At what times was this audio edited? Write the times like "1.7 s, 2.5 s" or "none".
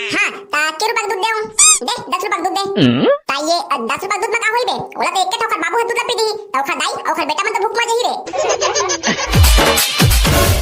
1.7 s, 9.3 s